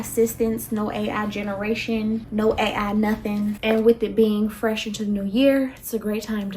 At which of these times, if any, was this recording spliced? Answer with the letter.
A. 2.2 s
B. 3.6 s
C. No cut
B